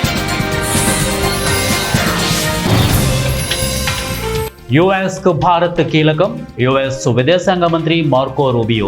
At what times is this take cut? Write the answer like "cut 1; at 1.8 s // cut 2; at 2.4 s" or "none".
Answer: cut 1; at 4.5 s